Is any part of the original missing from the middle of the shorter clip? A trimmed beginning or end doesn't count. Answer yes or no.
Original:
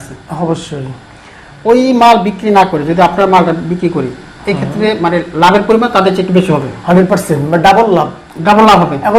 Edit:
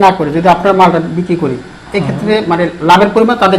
no